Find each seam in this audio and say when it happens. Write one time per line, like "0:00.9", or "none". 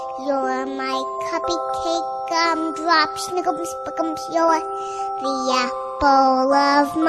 none